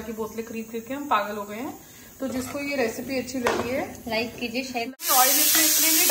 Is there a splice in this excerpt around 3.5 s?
no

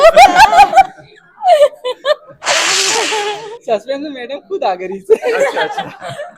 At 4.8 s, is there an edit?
no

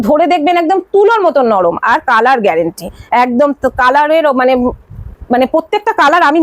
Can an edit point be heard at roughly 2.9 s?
no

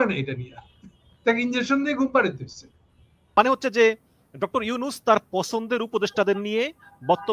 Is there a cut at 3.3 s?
yes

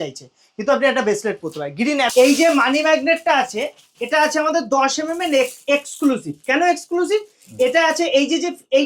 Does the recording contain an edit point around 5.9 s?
no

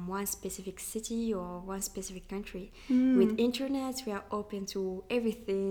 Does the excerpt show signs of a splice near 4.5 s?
no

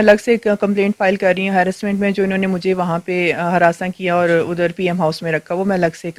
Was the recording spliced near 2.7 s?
no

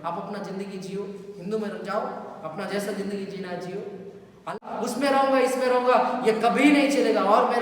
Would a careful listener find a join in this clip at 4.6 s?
yes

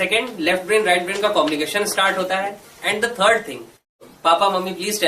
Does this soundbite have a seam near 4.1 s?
yes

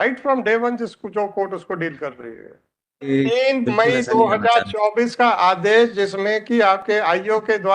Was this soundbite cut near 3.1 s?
yes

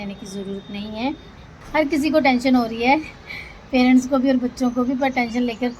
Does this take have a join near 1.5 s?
yes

